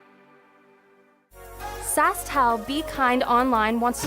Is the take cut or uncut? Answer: cut